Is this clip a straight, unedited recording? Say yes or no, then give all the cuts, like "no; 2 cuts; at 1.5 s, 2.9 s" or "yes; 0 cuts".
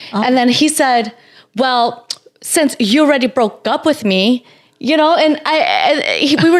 yes; 0 cuts